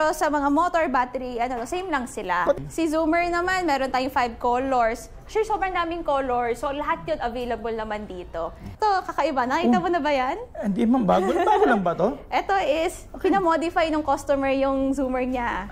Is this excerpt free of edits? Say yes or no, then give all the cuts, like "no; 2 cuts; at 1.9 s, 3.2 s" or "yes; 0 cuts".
no; 2 cuts; at 2.6 s, 8.6 s